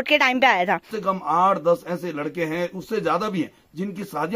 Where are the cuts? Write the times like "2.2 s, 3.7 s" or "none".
0.9 s